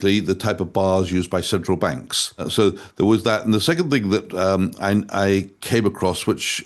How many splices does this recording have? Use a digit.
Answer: 1